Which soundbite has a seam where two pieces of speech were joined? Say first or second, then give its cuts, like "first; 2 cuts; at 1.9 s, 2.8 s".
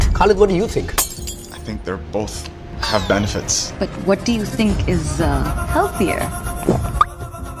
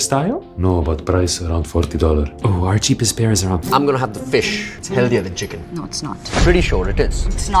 second; 1 cut; at 3.6 s